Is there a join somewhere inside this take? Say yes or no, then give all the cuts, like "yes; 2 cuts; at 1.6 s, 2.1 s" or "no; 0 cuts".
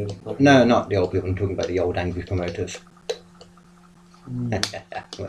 no; 0 cuts